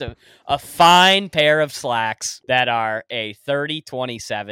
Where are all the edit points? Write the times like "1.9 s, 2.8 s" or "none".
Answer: 2.3 s

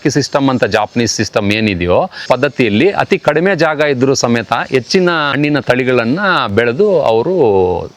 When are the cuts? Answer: 2.2 s, 5.3 s

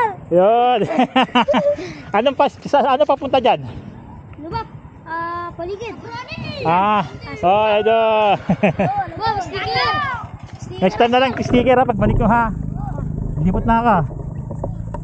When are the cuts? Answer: none

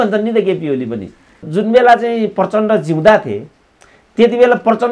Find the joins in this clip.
1.5 s

